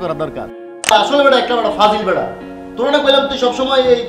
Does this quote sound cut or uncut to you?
cut